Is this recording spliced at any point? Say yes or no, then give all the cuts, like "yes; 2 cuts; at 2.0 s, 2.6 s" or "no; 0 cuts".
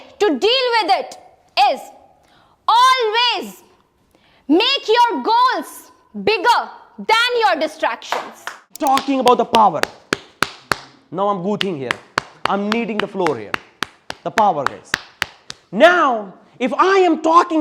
yes; 1 cut; at 8.8 s